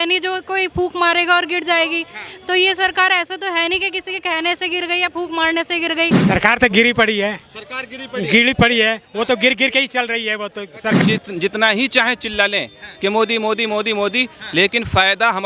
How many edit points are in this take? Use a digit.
2